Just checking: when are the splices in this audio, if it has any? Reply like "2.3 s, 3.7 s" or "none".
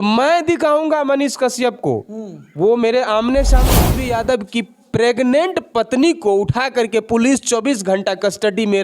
3.7 s